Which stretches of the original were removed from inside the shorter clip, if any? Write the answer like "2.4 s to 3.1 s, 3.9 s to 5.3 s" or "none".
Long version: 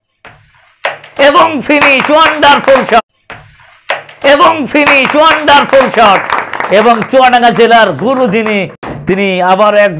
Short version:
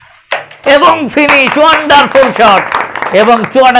3.0 s to 6.0 s